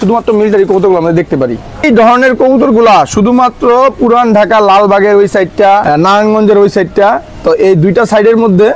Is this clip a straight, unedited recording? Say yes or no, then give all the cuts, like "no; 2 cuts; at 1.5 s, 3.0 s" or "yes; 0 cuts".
no; 2 cuts; at 1.8 s, 5.8 s